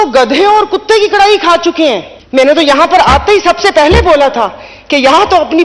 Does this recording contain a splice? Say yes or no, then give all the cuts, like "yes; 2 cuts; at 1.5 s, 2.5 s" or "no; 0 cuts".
yes; 1 cut; at 2.1 s